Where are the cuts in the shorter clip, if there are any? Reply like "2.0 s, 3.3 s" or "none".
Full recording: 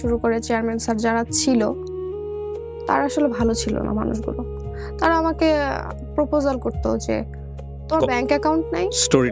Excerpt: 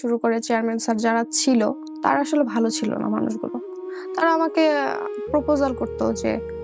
1.9 s